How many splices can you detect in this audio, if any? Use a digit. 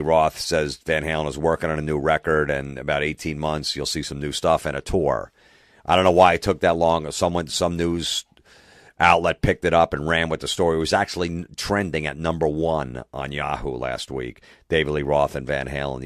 0